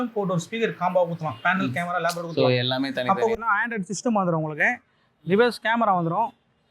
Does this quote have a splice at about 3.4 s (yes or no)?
yes